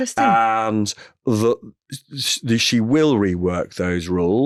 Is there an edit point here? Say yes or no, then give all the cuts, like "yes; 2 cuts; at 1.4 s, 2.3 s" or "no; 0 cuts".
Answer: no; 0 cuts